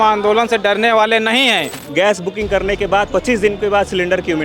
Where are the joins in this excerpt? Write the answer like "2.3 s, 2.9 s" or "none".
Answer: 1.8 s